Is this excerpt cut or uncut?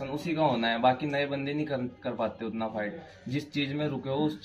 uncut